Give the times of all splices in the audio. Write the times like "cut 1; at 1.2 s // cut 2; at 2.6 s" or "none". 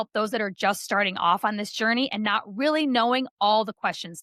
none